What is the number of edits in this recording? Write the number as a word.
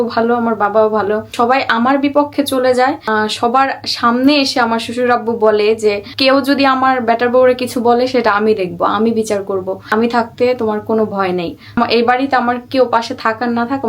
five